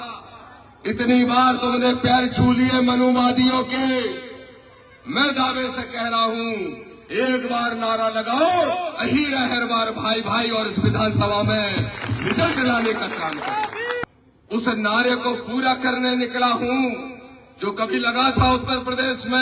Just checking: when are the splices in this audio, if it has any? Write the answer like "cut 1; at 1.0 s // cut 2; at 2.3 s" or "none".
cut 1; at 14.1 s